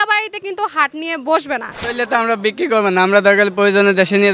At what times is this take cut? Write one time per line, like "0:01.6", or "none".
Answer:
0:01.8